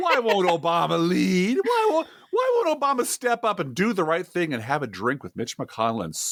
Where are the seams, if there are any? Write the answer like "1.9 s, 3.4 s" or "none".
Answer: none